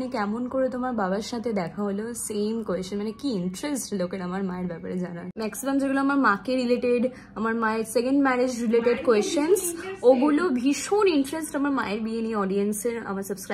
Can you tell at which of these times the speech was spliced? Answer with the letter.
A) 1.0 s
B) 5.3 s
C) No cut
B